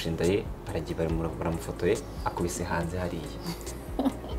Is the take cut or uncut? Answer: uncut